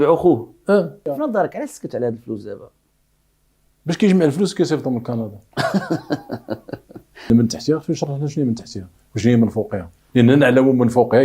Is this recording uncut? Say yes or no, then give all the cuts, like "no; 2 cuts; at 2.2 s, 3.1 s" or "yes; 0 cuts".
no; 2 cuts; at 1.1 s, 7.3 s